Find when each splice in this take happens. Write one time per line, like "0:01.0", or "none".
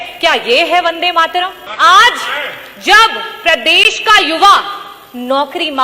0:01.6